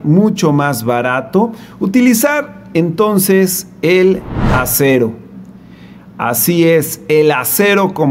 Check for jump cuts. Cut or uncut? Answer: uncut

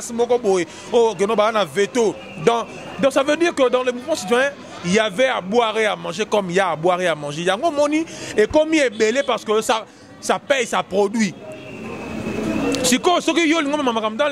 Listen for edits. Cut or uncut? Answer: uncut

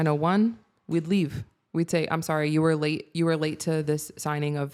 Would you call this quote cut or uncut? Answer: uncut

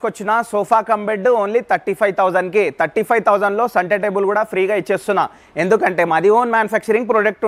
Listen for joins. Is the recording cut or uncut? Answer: uncut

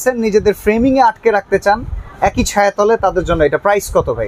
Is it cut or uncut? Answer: uncut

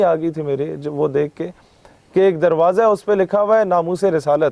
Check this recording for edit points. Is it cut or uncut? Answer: uncut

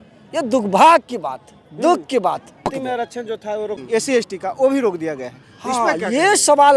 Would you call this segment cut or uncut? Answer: cut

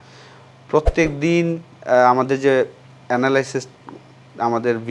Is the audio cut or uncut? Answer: uncut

